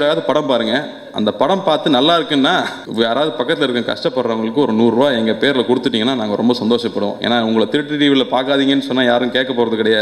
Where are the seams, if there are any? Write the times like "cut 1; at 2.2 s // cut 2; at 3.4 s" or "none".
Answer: cut 1; at 2.8 s

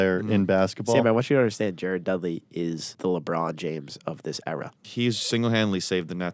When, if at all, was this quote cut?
cut 1; at 2.9 s // cut 2; at 4.8 s

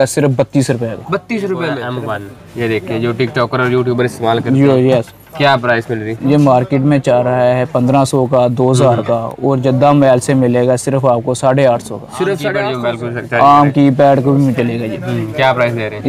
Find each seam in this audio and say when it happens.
cut 1; at 1.9 s // cut 2; at 12.6 s

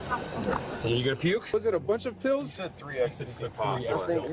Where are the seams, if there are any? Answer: cut 1; at 1.4 s

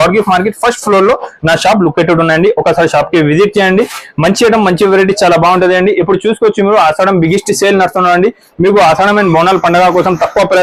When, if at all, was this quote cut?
none

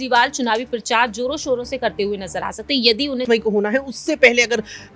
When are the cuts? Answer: cut 1; at 3.2 s

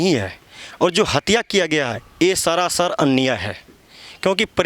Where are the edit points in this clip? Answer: none

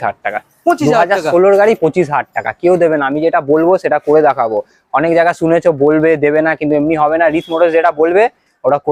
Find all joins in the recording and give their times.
none

